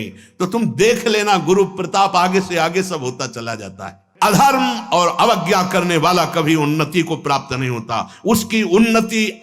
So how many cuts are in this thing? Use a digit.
1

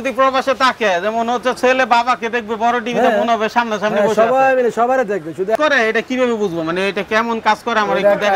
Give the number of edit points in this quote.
1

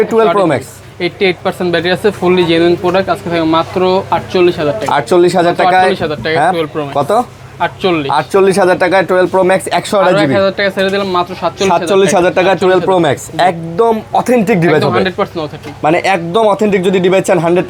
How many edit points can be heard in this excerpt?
0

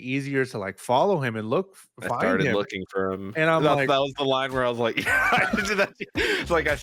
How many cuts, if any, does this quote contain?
0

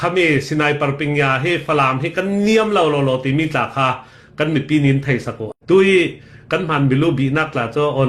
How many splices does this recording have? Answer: 1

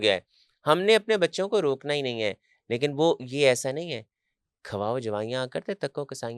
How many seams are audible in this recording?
0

